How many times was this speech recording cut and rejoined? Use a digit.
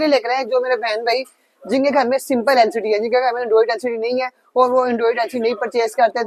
0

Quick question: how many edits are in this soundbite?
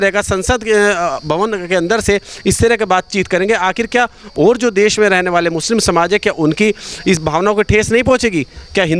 0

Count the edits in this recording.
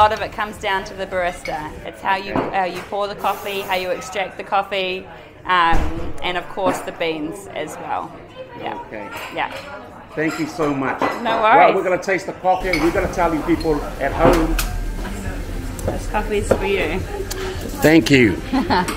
0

